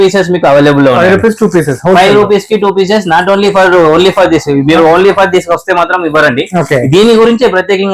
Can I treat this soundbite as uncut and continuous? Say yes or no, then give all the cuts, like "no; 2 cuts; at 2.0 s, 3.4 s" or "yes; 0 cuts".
yes; 0 cuts